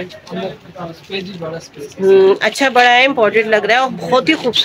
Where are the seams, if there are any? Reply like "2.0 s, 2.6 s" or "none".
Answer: none